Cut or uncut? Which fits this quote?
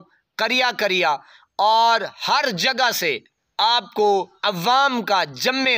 cut